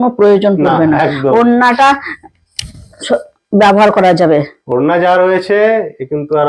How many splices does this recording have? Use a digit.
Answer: 0